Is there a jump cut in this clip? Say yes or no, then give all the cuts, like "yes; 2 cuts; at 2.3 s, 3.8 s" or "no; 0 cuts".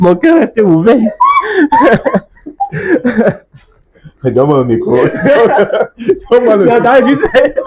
no; 0 cuts